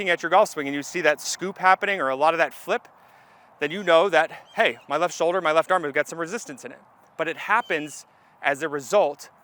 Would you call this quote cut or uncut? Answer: uncut